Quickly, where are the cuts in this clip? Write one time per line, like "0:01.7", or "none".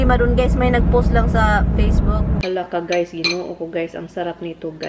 0:02.4